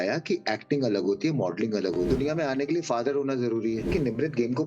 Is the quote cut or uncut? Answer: cut